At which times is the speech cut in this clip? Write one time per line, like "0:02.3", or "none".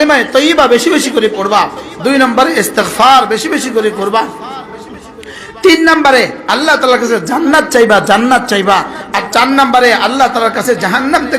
none